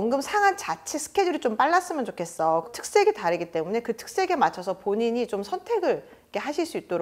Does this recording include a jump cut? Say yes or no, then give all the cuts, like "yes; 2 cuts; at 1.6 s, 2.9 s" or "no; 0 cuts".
yes; 1 cut; at 2.7 s